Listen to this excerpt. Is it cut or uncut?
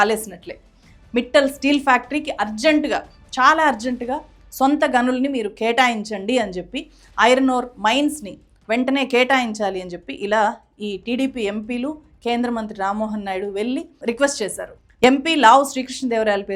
uncut